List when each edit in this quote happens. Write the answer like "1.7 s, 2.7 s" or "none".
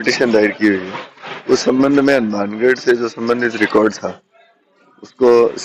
none